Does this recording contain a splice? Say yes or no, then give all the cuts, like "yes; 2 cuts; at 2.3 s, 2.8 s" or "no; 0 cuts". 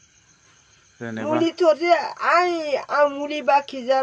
no; 0 cuts